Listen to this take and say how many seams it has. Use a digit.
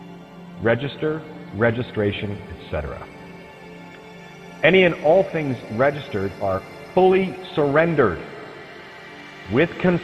1